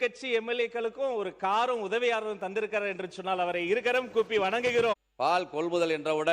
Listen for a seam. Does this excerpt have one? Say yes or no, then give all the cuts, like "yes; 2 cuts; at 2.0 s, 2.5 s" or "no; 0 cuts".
yes; 1 cut; at 5.0 s